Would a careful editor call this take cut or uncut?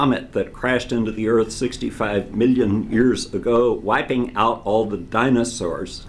cut